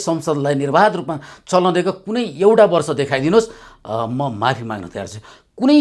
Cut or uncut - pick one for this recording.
uncut